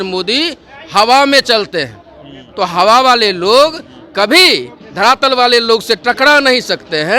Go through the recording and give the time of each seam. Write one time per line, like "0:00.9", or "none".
none